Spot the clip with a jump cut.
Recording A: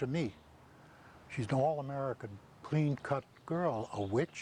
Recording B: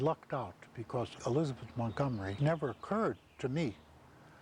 B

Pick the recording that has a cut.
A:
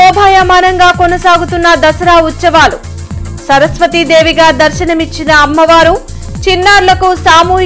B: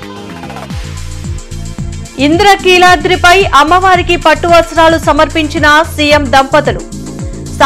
B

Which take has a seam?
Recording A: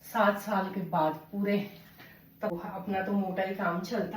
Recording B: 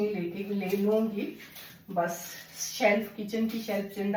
A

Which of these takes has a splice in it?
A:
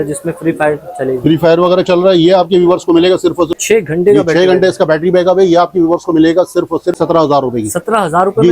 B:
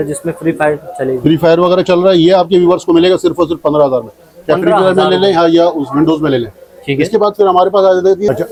A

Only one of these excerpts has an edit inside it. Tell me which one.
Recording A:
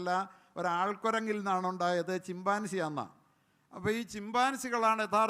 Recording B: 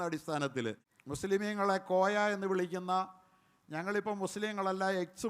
B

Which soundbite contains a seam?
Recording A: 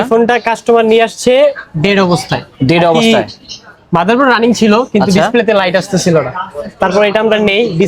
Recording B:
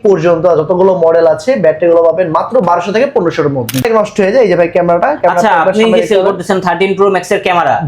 B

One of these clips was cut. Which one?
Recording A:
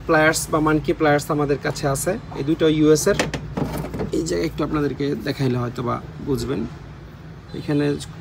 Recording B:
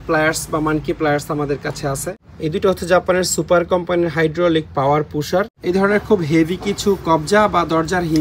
B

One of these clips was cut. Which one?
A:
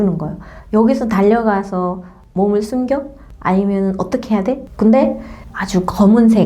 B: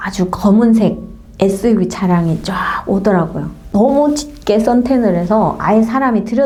A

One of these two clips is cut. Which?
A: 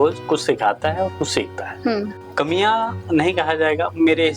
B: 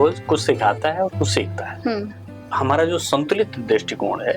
B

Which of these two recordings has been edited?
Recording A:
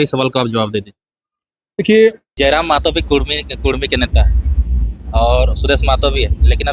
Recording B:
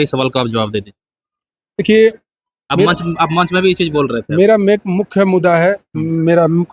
A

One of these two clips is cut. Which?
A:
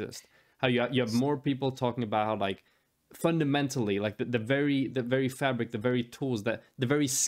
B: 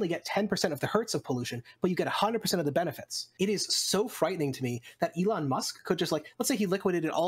B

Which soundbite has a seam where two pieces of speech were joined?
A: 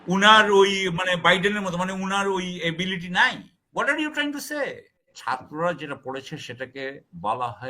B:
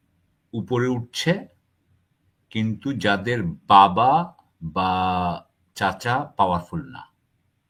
A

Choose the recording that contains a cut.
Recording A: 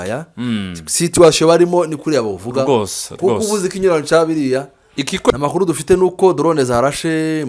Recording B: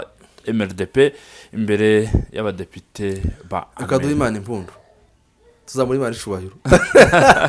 A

